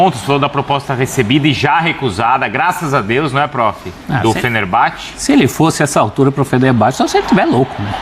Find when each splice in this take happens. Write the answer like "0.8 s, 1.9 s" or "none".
none